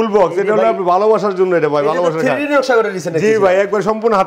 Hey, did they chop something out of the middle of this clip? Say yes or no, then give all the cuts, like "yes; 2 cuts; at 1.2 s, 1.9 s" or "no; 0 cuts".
no; 0 cuts